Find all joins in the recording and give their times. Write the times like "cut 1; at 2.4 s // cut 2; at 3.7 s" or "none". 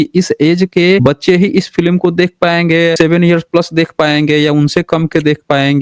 cut 1; at 1.0 s // cut 2; at 2.9 s